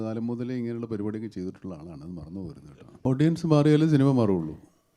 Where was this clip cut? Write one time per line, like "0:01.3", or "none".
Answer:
0:03.0